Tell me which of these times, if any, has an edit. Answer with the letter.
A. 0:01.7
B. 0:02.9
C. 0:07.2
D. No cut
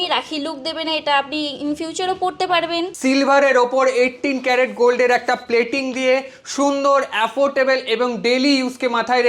B